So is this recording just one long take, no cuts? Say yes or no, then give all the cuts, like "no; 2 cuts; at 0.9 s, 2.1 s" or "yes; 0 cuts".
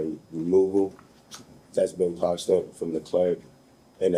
yes; 0 cuts